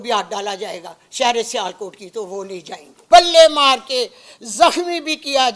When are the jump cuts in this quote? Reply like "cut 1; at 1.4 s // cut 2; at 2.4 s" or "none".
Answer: cut 1; at 3.0 s